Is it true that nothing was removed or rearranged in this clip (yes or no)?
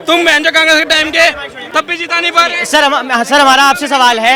yes